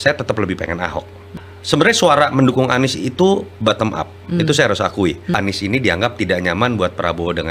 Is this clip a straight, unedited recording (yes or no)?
no